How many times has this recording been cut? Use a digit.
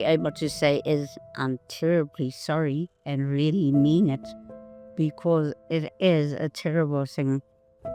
0